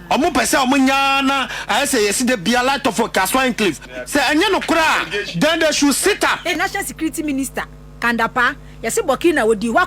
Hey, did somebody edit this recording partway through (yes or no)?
yes